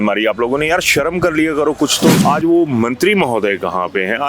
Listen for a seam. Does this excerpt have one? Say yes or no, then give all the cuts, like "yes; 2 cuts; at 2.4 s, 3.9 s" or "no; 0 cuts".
yes; 1 cut; at 2.2 s